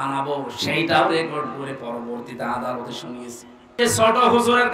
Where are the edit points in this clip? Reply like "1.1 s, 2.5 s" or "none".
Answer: 3.7 s